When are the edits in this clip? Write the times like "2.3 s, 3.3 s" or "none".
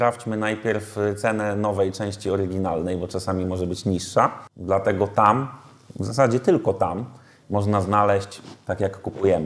4.5 s

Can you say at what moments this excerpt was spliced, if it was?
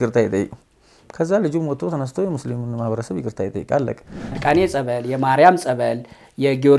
4.3 s

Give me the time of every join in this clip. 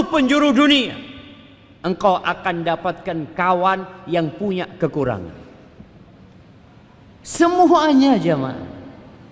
none

